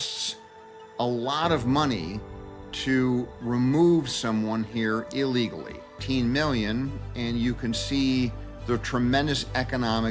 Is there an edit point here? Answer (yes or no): yes